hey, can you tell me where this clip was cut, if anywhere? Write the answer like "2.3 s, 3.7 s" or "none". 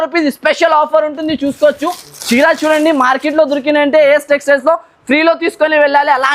none